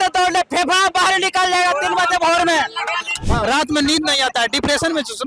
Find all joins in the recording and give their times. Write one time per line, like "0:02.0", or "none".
0:03.2